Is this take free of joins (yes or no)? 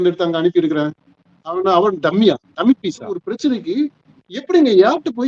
no